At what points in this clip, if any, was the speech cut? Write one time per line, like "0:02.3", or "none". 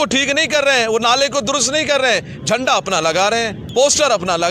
0:03.6